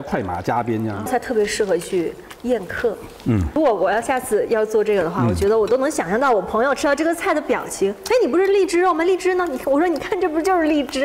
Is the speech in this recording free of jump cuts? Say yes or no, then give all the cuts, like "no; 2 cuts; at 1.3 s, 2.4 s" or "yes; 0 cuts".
no; 2 cuts; at 1.1 s, 3.6 s